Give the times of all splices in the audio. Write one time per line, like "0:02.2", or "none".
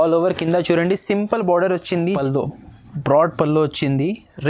0:02.1